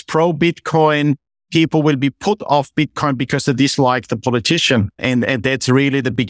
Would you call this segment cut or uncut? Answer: cut